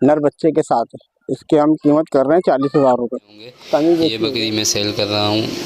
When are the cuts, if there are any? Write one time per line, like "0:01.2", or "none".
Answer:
0:04.2